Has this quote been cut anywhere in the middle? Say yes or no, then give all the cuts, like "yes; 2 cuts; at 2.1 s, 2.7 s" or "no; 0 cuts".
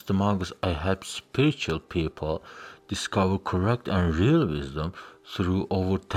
no; 0 cuts